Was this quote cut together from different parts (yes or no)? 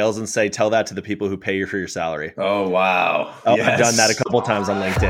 no